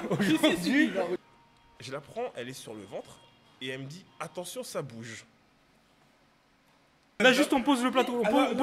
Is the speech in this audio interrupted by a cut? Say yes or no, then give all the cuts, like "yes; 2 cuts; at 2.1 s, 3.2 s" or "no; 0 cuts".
yes; 2 cuts; at 1.2 s, 7.1 s